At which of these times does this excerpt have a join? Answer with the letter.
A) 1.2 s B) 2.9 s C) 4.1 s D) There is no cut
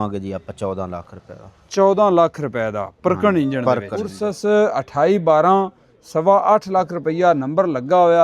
C